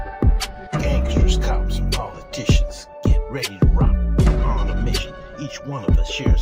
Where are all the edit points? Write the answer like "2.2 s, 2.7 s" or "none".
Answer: none

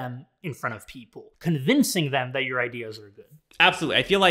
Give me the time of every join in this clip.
1.2 s

